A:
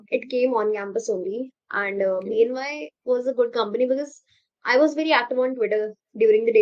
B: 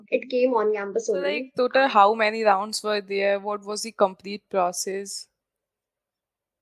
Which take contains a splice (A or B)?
B